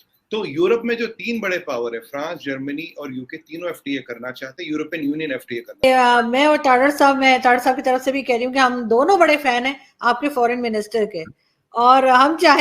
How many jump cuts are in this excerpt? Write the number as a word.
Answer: one